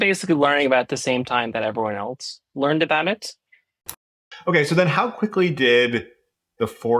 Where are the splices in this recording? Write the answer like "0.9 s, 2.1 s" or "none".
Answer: 4.0 s